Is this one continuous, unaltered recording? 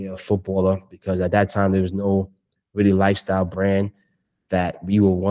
yes; 0 cuts

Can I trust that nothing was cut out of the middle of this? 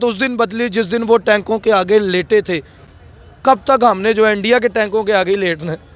yes; 0 cuts

